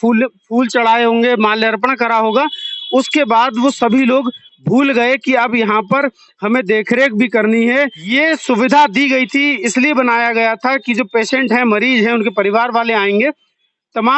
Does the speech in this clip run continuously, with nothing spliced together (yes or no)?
no